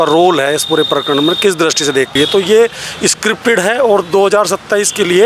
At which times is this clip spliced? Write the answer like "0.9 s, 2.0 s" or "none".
2.1 s